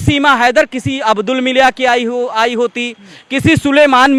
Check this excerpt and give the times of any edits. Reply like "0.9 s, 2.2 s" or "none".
none